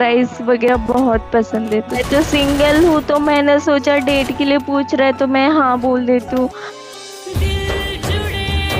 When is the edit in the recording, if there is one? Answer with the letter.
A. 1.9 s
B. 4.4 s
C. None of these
A